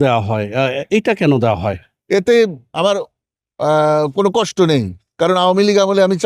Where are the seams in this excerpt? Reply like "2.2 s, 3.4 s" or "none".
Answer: none